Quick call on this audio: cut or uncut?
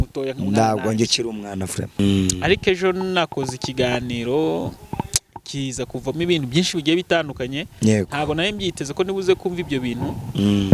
cut